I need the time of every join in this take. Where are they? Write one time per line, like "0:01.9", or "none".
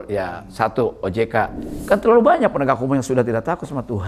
0:01.7